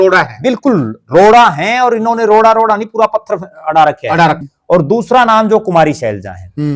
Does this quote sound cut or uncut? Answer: cut